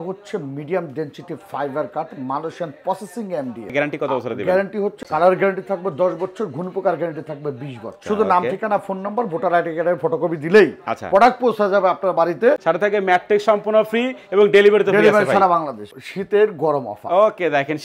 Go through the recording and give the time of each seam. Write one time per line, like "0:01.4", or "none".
0:03.7
0:05.0
0:08.0
0:12.6
0:15.8